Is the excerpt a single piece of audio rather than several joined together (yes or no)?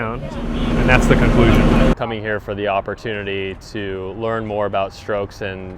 no